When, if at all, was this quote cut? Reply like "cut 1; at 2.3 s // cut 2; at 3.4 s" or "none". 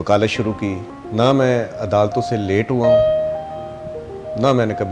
cut 1; at 0.9 s